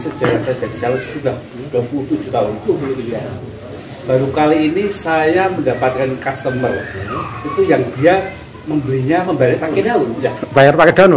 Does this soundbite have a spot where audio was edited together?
yes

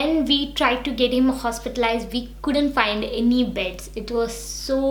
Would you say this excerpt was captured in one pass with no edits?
yes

